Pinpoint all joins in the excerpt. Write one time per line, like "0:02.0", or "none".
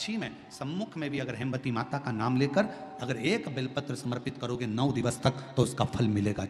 none

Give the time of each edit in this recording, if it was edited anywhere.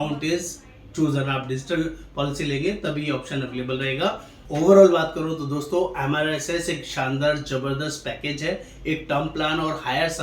0:04.3

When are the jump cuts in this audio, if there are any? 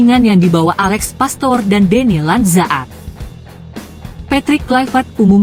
0:02.9
0:04.1

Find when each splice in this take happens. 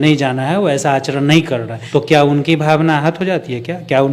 0:01.7

